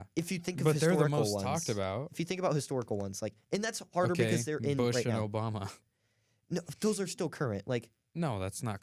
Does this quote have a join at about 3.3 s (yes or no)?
no